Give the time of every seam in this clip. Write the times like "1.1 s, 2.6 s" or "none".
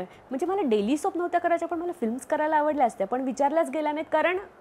none